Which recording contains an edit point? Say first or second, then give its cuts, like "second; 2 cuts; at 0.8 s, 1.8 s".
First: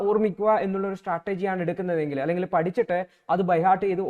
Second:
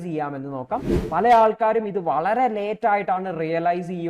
second; 1 cut; at 1.0 s